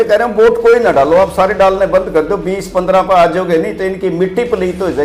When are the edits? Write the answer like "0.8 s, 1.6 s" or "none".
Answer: none